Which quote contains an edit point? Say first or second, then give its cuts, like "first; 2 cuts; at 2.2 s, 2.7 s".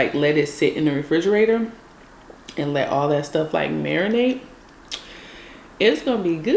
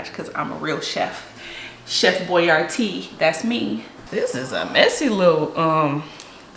second; 1 cut; at 3.9 s